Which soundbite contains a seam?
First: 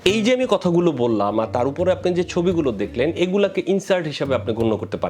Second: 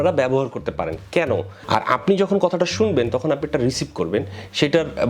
second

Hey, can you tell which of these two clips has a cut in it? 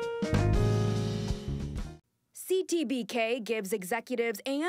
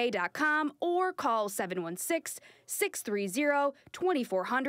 first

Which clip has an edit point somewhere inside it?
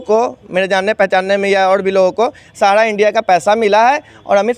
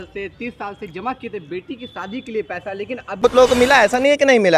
second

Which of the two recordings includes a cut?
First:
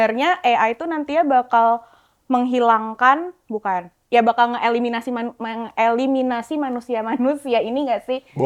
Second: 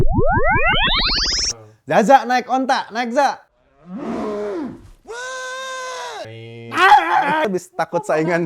second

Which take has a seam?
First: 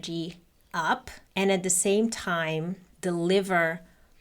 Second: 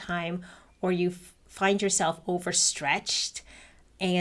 first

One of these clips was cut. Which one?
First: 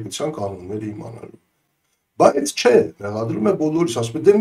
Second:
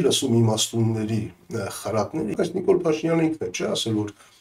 second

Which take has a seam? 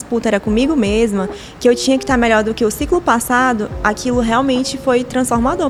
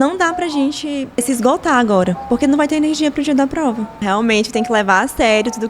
second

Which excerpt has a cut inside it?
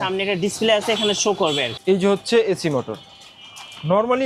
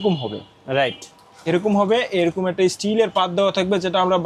first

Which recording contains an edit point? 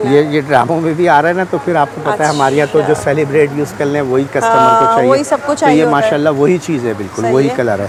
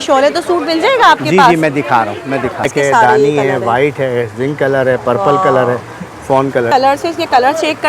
second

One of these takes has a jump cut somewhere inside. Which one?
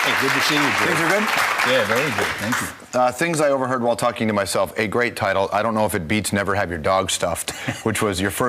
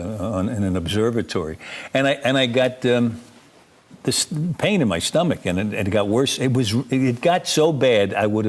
first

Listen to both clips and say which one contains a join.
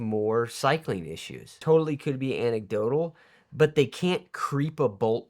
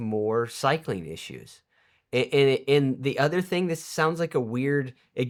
first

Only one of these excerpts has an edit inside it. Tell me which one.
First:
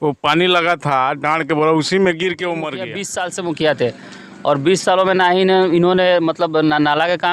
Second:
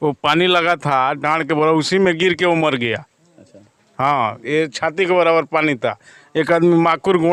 first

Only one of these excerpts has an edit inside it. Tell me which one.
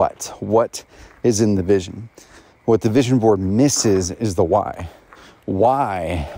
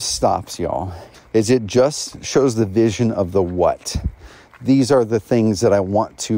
second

